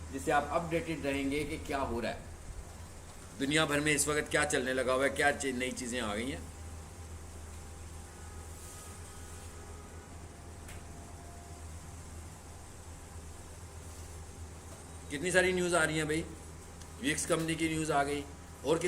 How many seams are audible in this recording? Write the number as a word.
one